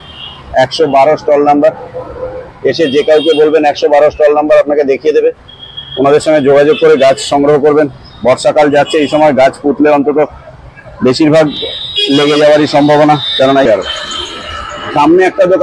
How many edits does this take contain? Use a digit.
1